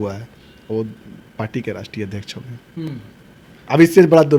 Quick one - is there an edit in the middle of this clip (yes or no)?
no